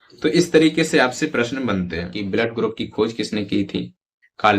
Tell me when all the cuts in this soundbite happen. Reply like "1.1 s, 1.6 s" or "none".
2.2 s